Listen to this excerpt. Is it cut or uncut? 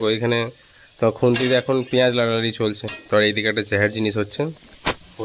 cut